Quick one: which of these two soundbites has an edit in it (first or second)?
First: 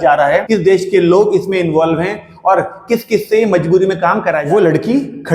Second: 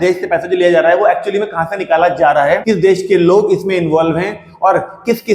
first